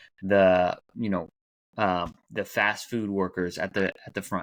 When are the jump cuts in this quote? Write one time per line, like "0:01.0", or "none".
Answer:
none